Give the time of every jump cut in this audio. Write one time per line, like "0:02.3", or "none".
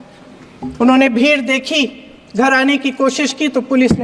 none